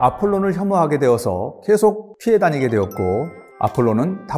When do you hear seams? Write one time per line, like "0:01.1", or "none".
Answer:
0:02.1
0:03.4